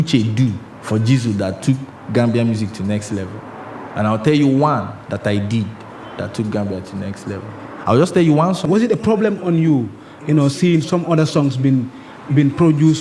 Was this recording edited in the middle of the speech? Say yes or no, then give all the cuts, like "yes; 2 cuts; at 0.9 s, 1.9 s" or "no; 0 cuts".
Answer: yes; 1 cut; at 8.6 s